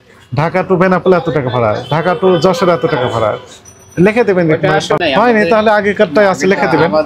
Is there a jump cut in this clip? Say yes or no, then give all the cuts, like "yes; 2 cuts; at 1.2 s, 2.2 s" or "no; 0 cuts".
yes; 1 cut; at 5.0 s